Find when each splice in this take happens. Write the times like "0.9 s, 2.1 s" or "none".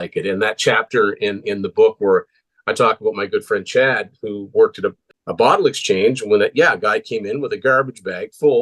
5.1 s